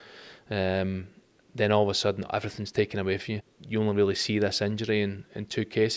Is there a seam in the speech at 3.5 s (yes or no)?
yes